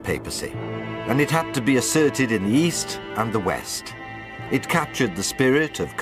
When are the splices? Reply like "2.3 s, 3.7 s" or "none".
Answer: 3.0 s